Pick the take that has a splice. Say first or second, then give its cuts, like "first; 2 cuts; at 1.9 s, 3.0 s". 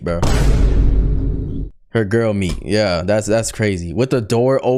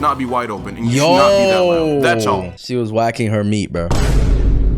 second; 1 cut; at 2.6 s